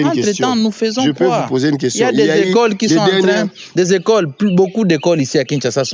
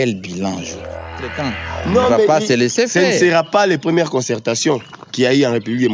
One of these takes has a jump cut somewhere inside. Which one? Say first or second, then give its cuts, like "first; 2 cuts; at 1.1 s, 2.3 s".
second; 1 cut; at 1.3 s